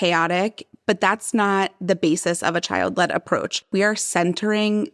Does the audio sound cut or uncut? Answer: cut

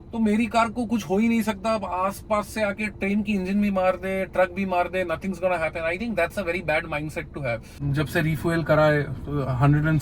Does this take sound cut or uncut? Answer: cut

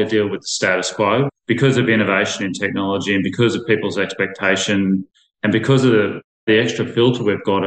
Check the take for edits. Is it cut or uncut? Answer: cut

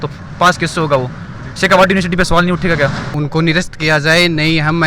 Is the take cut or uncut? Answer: cut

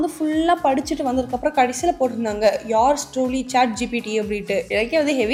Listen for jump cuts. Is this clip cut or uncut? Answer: uncut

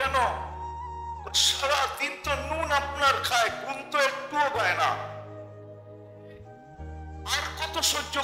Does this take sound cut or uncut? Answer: uncut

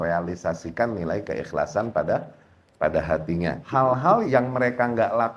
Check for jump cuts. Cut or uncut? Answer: cut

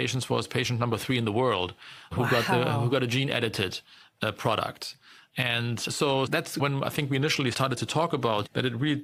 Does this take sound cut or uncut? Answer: uncut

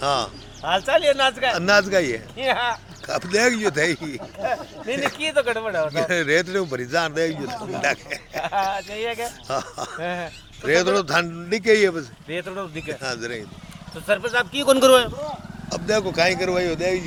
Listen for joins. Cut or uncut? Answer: uncut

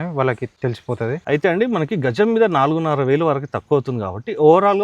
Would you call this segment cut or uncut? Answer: cut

